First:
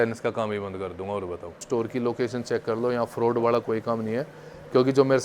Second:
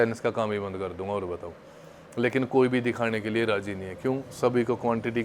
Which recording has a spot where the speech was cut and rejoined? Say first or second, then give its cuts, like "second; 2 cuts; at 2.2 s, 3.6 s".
first; 1 cut; at 1.6 s